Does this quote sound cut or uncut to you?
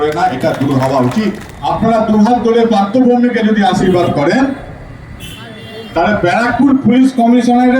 cut